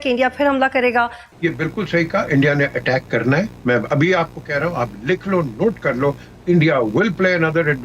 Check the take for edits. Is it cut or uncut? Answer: cut